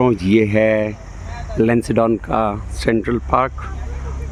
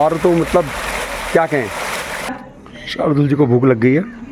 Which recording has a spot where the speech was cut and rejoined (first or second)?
second